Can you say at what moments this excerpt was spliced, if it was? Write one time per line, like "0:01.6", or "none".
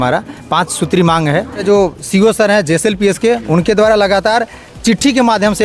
0:01.6